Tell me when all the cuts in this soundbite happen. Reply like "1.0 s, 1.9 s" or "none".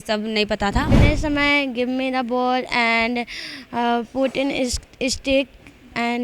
0.9 s